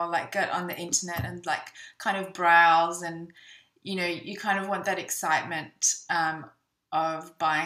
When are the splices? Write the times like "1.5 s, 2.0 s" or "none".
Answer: 1.1 s